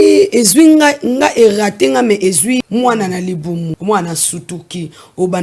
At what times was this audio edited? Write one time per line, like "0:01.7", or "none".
0:02.6
0:03.8